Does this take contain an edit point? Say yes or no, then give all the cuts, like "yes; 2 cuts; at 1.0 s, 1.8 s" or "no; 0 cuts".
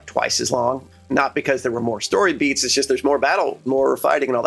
yes; 2 cuts; at 1.0 s, 3.7 s